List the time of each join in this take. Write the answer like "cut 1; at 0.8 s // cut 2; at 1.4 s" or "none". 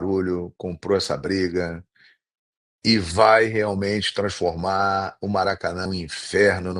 cut 1; at 5.8 s